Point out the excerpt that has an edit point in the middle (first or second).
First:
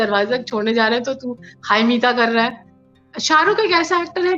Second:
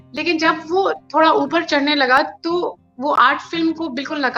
first